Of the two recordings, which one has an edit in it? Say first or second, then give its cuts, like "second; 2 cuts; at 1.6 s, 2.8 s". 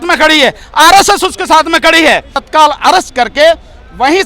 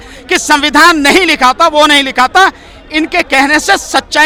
first; 1 cut; at 2.4 s